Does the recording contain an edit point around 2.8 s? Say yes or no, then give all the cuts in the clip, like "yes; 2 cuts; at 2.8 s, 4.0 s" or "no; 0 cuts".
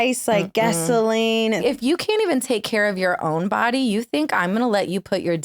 no; 1 cut; at 1.6 s